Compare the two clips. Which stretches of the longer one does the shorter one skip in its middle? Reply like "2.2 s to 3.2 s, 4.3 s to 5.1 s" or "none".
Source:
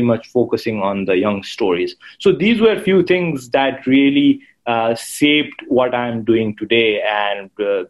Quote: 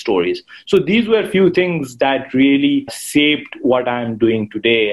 4.5 s to 5.1 s